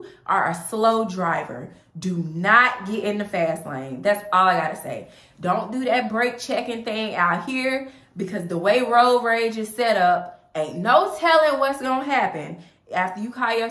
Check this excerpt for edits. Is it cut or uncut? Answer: uncut